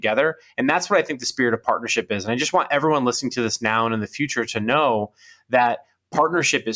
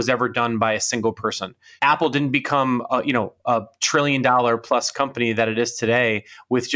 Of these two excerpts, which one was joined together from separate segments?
second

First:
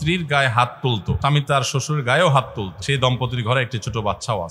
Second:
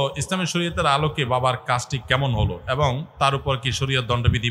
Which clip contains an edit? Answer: first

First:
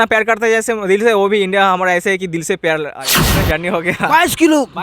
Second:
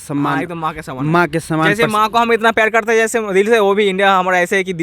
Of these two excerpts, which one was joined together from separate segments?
first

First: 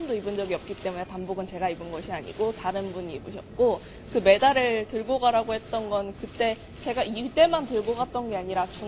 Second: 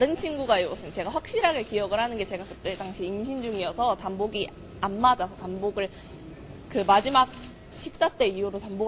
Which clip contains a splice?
second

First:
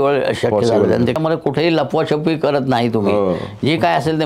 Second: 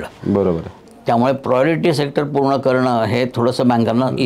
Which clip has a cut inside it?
first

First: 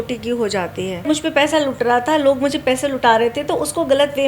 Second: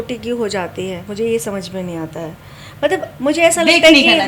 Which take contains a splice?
first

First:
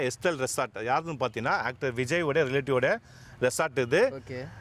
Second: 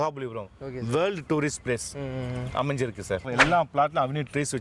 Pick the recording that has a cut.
second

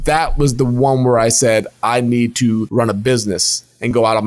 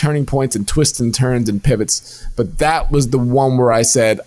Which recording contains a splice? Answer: first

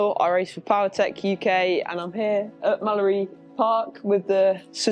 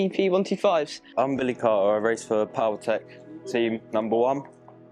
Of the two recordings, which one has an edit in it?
second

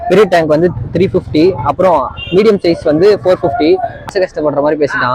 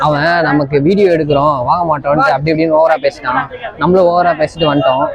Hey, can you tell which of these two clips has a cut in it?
first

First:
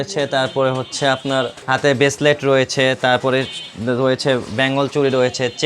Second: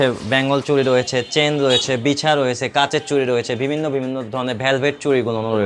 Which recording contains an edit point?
first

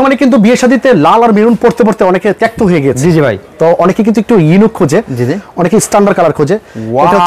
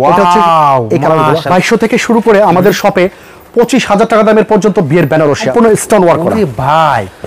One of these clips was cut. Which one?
second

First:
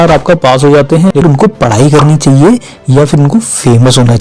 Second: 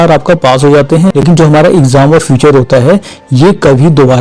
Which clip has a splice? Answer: first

